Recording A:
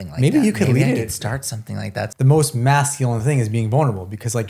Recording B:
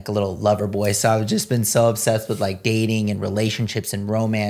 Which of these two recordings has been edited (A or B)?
A